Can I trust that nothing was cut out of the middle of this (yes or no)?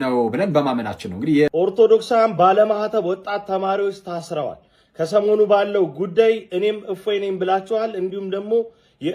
no